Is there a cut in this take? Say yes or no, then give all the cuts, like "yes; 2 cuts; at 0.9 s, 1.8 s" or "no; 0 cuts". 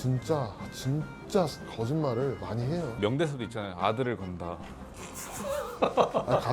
no; 0 cuts